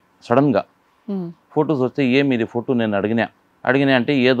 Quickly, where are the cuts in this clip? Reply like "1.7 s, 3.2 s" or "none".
none